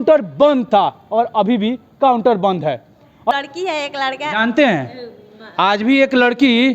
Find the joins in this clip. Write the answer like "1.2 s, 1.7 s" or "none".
3.3 s